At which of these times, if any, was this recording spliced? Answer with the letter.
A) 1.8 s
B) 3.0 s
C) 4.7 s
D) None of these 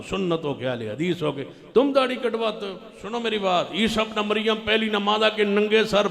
B